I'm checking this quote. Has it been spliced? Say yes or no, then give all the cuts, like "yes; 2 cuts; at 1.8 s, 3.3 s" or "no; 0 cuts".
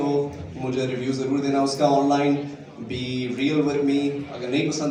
no; 0 cuts